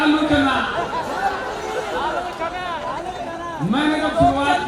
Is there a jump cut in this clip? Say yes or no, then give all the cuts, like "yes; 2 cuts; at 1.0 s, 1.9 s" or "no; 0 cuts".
no; 0 cuts